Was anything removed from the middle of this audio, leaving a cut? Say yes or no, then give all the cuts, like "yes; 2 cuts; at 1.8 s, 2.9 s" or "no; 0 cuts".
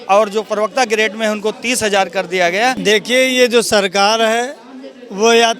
yes; 1 cut; at 2.8 s